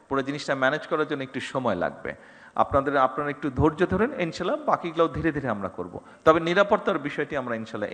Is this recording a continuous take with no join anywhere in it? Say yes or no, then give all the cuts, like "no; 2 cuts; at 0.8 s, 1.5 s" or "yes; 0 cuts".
yes; 0 cuts